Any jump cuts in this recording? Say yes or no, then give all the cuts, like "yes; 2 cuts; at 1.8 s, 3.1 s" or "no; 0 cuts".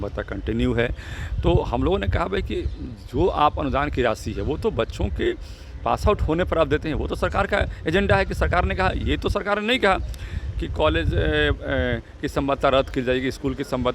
no; 0 cuts